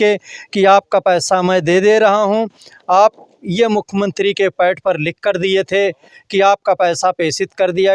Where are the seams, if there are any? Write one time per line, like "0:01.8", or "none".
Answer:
none